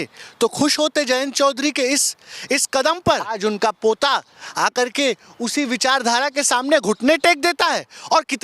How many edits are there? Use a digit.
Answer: 1